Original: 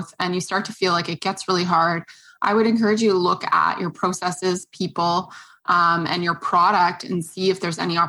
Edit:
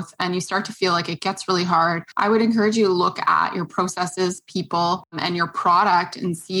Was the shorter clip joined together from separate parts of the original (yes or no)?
yes